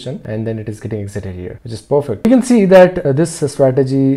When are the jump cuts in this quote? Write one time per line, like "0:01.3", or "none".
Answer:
0:02.2
0:03.0